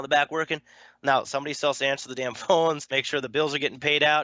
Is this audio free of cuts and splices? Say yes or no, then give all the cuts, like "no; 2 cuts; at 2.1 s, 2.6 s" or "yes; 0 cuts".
no; 1 cut; at 2.8 s